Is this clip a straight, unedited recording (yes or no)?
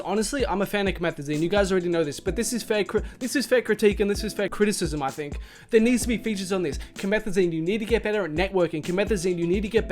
no